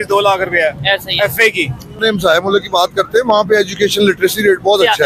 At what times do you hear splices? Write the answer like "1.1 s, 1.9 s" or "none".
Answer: 2.0 s